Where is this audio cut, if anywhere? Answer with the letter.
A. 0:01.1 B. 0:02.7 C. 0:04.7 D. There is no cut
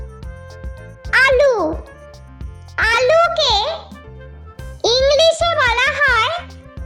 A